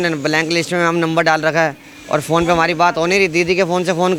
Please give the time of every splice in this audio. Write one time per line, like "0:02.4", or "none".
none